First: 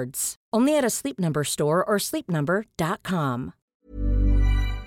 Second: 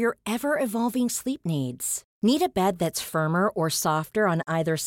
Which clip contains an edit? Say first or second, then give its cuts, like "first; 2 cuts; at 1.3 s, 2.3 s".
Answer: first; 1 cut; at 3.6 s